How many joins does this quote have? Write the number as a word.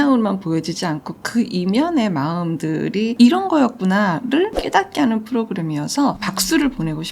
one